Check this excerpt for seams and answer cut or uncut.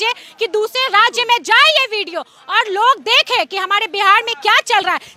uncut